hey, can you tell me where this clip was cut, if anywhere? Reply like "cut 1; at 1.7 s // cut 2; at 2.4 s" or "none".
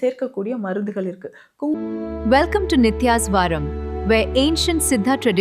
cut 1; at 1.7 s